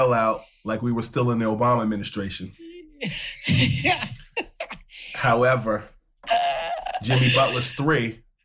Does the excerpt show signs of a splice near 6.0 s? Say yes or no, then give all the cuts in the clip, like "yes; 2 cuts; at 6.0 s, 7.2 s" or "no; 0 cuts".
no; 0 cuts